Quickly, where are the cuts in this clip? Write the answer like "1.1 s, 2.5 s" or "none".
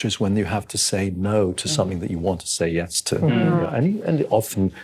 3.7 s